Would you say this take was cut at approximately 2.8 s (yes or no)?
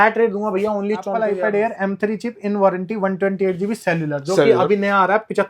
no